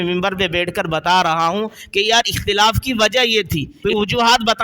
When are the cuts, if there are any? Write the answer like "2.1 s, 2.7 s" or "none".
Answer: 3.7 s